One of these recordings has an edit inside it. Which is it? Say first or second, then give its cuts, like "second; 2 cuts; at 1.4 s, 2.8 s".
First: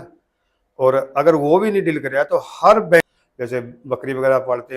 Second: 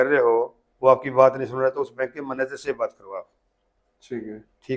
first; 1 cut; at 3.2 s